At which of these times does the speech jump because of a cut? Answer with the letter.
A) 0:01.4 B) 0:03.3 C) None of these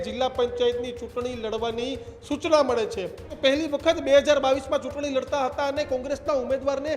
B